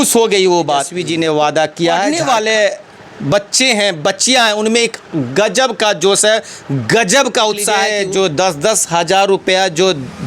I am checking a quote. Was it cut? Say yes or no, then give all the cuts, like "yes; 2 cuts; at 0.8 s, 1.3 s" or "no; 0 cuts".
yes; 3 cuts; at 1.0 s, 2.1 s, 7.9 s